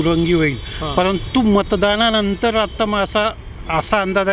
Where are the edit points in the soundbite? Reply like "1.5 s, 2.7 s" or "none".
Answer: none